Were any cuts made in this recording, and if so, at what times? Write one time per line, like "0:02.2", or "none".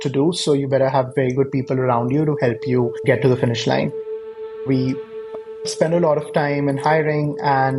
none